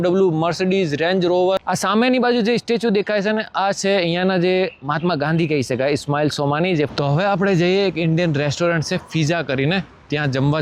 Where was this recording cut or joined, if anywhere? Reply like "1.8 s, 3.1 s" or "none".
1.6 s, 6.9 s